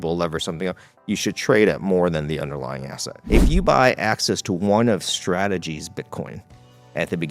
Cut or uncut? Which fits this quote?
cut